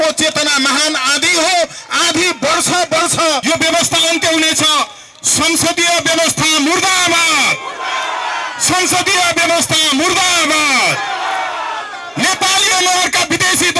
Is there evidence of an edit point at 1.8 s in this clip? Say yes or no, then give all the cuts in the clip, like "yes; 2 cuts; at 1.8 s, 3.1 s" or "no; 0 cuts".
no; 1 cut; at 3.4 s